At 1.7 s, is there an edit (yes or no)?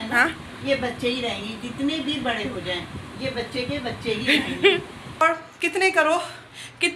no